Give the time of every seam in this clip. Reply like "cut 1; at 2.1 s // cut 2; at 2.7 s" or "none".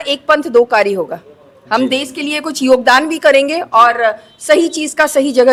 none